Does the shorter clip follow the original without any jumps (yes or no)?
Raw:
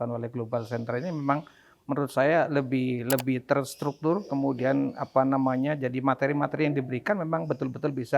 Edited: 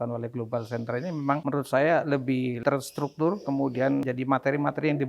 no